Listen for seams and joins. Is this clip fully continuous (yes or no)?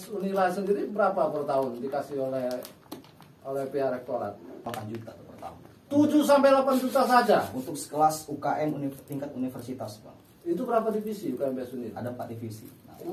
no